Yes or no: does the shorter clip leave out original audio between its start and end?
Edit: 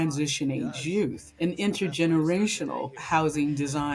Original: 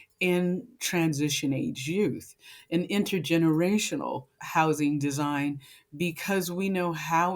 yes